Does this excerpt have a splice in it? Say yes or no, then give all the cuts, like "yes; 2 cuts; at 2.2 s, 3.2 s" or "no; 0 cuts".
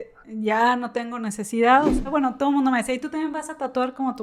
yes; 1 cut; at 2.1 s